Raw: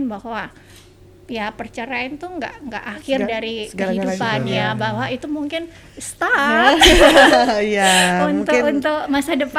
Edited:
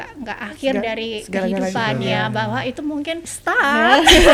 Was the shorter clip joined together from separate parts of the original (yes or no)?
yes